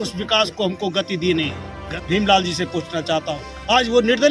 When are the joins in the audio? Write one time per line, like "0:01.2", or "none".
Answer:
0:01.8